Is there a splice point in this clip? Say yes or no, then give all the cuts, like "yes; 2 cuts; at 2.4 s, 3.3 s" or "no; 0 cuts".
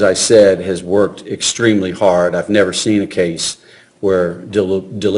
yes; 1 cut; at 2.8 s